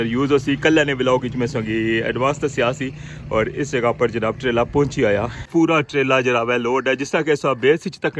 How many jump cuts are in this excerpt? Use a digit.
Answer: 1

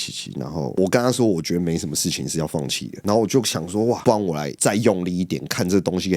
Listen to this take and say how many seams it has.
1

